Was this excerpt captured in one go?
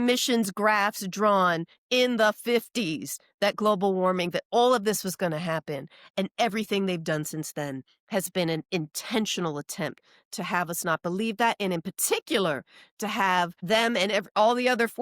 no; 1 cut; at 13.6 s

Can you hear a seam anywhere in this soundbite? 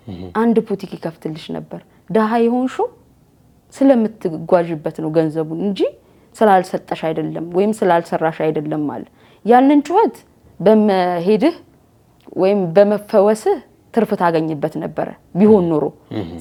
no; 0 cuts

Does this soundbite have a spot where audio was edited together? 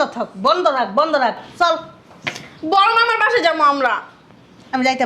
no; 0 cuts

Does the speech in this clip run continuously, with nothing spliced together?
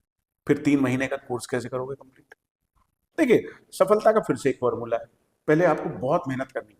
no; 1 cut; at 3.1 s

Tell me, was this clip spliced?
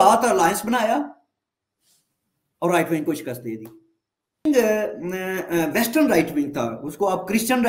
yes; 1 cut; at 4.4 s

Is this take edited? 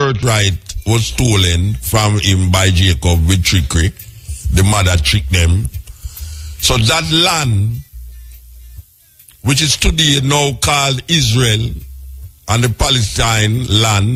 no; 0 cuts

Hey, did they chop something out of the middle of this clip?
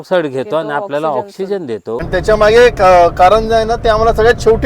yes; 1 cut; at 2.1 s

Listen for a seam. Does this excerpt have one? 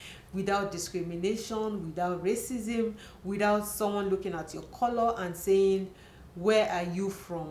no; 0 cuts

